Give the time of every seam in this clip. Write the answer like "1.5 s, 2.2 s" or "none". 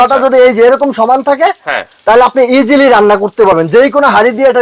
none